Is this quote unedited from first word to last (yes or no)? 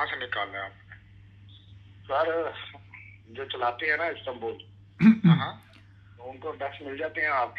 yes